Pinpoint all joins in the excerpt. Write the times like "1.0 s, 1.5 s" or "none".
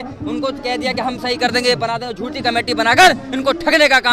none